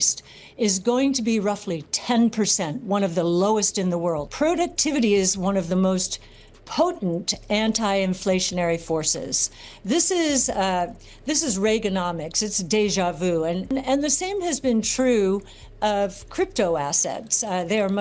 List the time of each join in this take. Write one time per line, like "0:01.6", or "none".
0:04.3
0:13.7